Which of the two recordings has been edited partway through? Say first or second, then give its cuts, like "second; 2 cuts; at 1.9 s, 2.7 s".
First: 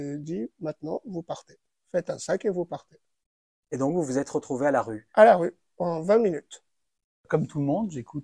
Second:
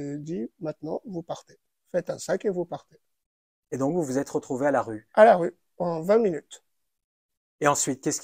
first; 1 cut; at 7.2 s